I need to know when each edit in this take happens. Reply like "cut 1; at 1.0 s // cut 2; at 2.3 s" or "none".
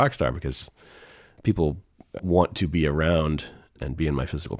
cut 1; at 2.2 s // cut 2; at 3.8 s